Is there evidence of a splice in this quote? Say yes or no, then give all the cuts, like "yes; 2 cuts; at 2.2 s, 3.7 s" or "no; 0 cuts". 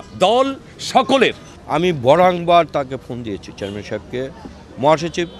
yes; 1 cut; at 1.5 s